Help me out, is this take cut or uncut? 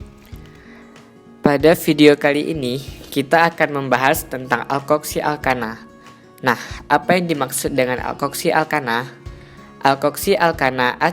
cut